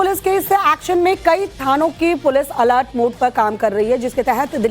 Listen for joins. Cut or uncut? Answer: cut